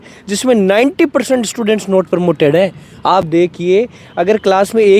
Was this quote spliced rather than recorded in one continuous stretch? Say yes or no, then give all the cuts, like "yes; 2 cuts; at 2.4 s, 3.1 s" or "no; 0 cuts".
no; 0 cuts